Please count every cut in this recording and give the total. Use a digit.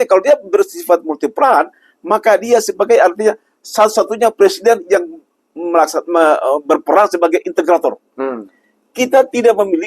0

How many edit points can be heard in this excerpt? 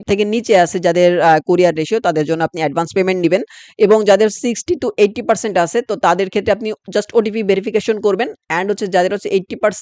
0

